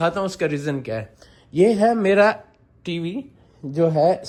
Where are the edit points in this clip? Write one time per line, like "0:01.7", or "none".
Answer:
none